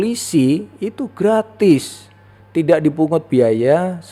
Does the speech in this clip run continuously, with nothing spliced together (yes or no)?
yes